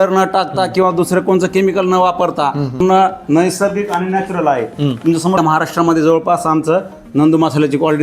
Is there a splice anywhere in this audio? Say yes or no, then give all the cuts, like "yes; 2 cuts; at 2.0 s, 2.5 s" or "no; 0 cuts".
yes; 2 cuts; at 2.8 s, 5.4 s